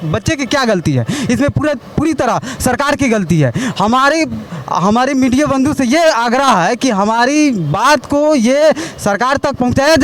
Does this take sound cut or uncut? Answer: uncut